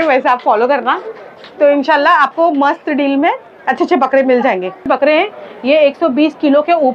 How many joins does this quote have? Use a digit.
1